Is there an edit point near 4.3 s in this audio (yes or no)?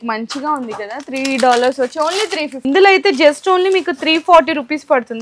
no